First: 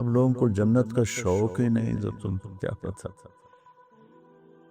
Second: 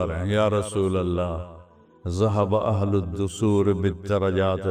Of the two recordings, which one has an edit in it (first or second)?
first